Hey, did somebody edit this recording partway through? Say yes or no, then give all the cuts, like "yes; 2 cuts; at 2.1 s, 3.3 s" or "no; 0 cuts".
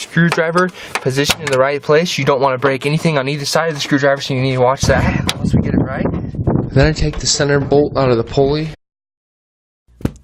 no; 0 cuts